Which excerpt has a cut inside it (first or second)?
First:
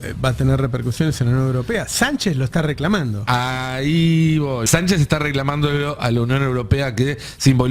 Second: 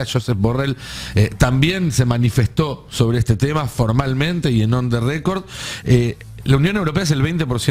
first